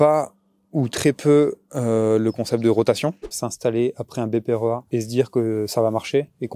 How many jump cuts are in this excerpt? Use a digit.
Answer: 2